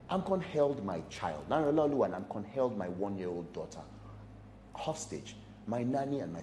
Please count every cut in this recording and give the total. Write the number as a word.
zero